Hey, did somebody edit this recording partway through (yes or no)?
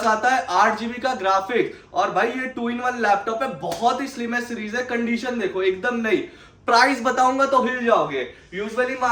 no